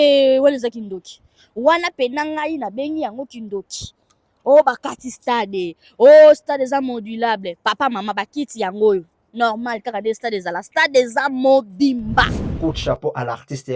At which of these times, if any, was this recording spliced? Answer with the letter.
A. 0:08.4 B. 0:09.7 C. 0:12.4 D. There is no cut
C